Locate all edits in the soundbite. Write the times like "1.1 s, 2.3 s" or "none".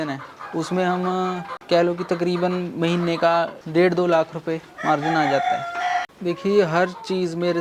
1.5 s, 3.6 s, 6.0 s

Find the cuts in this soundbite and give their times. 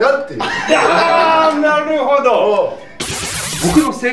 3.1 s

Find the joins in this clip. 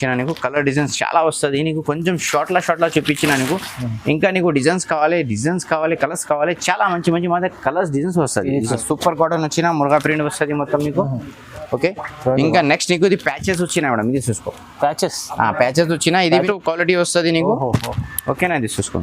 8.8 s, 16.4 s

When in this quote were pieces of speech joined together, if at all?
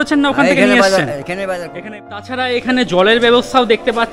1.7 s

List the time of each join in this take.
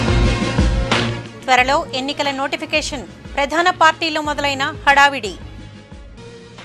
none

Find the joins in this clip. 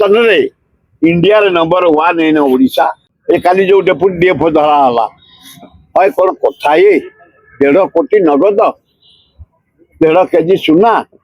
3.1 s

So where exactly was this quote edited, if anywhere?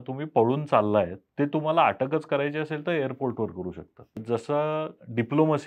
1.2 s, 4.2 s

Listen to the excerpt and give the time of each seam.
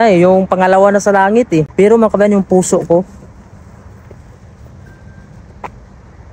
1.7 s

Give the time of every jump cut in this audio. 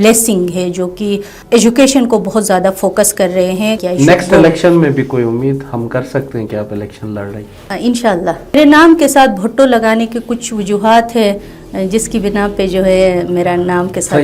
3.8 s, 8.6 s

